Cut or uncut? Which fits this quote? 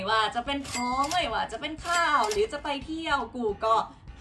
uncut